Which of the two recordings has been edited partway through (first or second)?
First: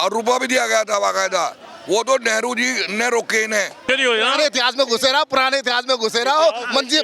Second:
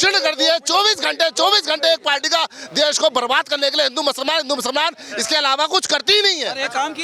first